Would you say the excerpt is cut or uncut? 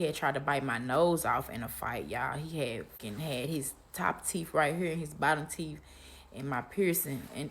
cut